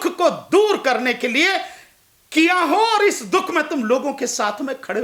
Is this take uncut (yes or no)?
yes